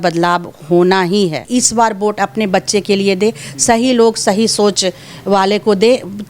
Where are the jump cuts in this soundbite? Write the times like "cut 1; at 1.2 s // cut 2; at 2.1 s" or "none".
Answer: cut 1; at 1.4 s